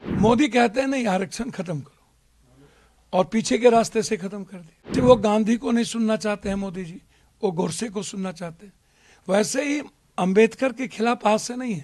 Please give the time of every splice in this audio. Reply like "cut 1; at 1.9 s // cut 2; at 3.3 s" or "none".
cut 1; at 4.9 s